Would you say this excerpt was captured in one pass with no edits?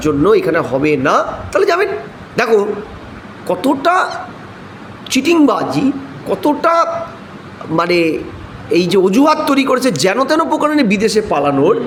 yes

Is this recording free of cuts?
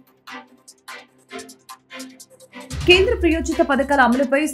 yes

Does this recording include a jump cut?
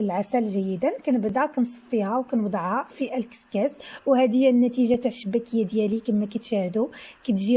no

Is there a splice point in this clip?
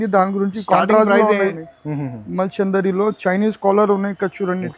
yes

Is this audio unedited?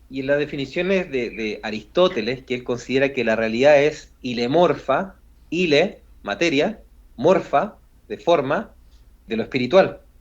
no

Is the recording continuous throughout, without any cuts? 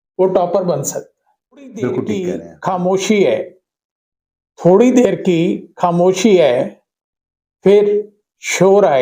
no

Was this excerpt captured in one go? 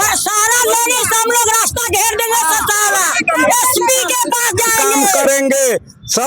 no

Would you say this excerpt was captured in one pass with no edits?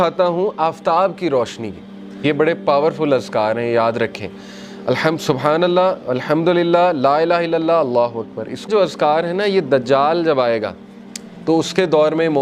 no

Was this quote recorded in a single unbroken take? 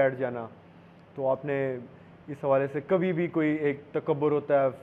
yes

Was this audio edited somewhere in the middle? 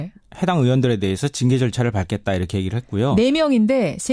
yes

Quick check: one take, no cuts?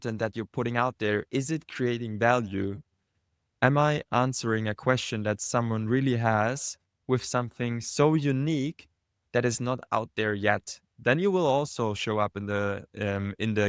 yes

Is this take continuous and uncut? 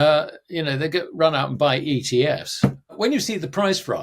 no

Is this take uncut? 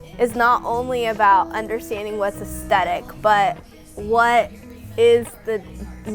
yes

